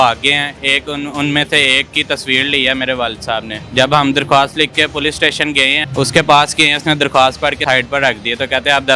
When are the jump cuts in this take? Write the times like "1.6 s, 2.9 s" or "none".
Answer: 3.6 s, 5.8 s, 7.6 s